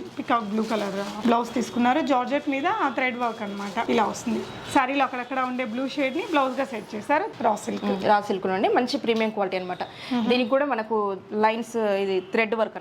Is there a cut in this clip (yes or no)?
yes